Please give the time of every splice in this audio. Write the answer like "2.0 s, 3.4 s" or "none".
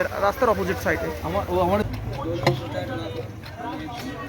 1.8 s